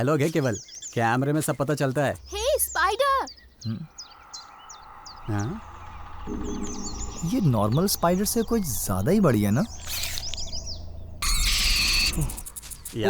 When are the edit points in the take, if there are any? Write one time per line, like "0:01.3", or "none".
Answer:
0:11.2